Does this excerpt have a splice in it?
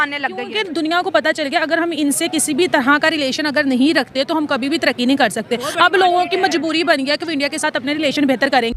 no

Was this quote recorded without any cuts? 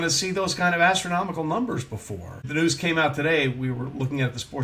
no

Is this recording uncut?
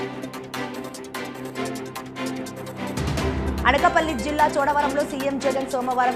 yes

